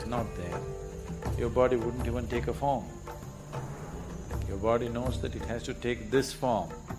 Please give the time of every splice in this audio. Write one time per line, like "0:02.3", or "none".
0:03.3